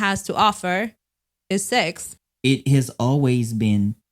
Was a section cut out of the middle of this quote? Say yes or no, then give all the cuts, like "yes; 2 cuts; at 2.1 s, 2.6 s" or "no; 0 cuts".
yes; 1 cut; at 2.1 s